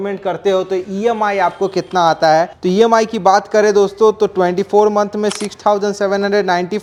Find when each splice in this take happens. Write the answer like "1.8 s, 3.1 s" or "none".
none